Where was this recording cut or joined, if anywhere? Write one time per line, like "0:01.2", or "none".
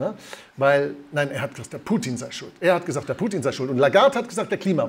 none